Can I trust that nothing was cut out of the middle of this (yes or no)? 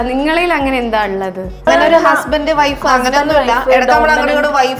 no